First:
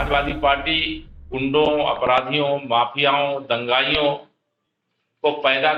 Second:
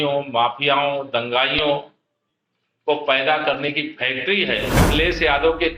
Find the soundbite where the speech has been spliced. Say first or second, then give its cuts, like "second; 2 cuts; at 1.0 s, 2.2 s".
second; 1 cut; at 4.8 s